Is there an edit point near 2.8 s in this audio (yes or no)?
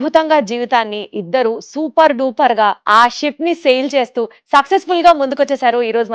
yes